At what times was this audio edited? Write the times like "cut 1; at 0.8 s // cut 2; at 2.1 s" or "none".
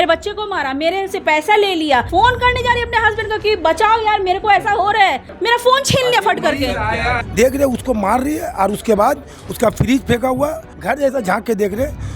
cut 1; at 2.1 s // cut 2; at 5.3 s // cut 3; at 6.9 s // cut 4; at 10.7 s